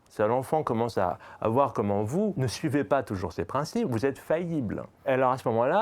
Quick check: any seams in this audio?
yes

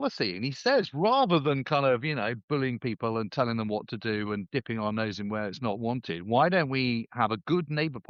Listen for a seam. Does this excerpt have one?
no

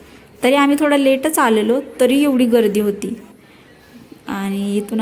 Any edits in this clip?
no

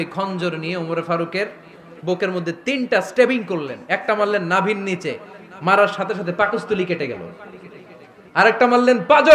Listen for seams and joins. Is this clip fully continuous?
yes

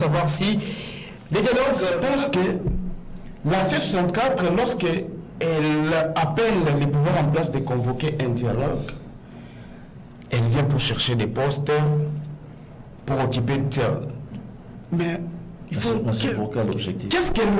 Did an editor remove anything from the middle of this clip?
yes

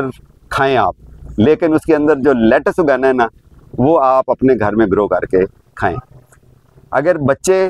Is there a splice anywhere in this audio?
no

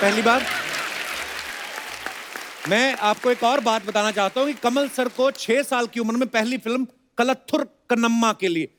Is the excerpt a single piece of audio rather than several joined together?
yes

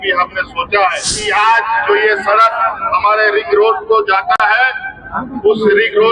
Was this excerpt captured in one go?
no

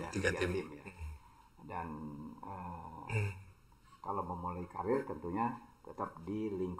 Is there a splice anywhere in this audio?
no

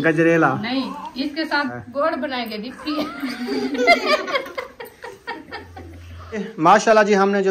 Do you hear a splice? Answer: yes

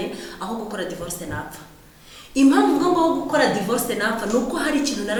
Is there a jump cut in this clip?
no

